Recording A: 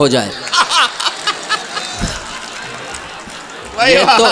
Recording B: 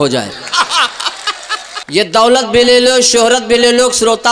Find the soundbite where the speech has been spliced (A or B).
B